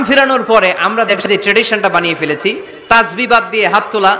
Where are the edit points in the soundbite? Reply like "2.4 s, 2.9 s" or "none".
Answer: 1.2 s